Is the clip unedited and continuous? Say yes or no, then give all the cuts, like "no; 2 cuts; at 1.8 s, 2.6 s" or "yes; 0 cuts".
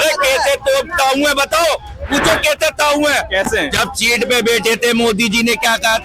yes; 0 cuts